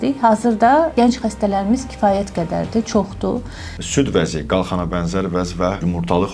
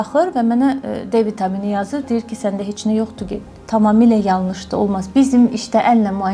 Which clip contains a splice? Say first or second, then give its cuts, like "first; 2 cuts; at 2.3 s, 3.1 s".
first; 1 cut; at 3.8 s